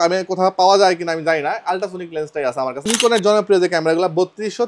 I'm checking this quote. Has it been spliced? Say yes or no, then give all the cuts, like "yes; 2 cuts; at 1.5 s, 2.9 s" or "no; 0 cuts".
yes; 1 cut; at 2.9 s